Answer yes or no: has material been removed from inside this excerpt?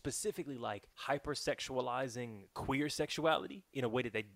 yes